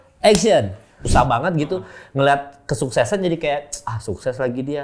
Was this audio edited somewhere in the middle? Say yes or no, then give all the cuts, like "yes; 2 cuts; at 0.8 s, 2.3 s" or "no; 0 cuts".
yes; 1 cut; at 1.0 s